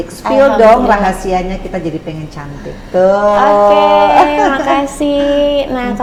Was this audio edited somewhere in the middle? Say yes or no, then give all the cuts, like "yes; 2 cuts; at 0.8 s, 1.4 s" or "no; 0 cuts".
no; 0 cuts